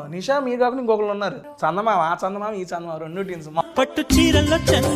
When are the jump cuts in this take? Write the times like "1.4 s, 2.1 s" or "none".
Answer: 1.5 s, 3.6 s